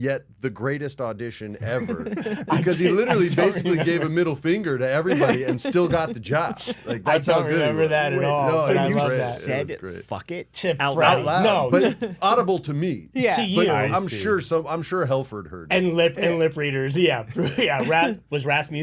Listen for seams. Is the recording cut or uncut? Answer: uncut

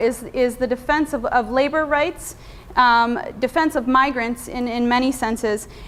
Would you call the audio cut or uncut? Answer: uncut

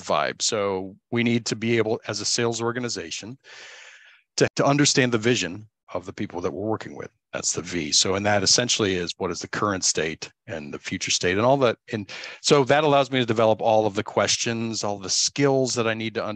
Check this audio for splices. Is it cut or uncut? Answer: cut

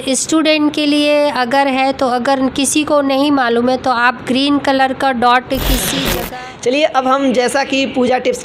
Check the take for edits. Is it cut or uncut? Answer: cut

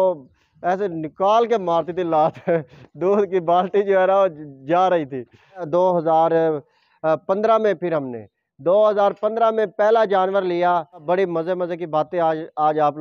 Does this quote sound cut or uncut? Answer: cut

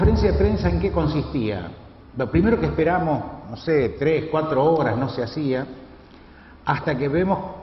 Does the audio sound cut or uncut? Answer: uncut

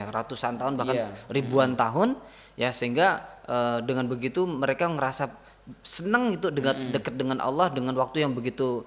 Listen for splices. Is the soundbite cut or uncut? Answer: uncut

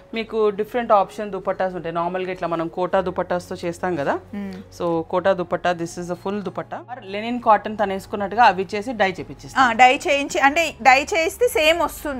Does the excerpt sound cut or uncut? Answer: cut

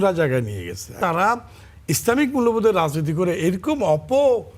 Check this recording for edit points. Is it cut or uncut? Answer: cut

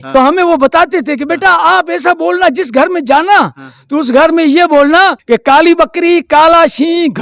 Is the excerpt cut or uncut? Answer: uncut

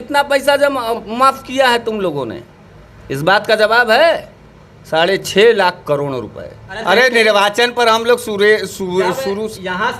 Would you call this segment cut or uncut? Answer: cut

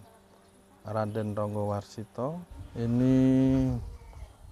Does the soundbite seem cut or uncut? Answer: cut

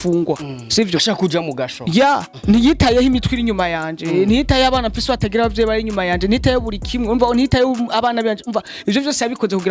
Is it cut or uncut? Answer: uncut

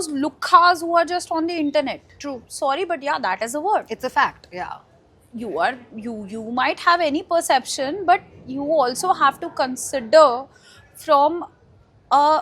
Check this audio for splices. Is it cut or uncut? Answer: uncut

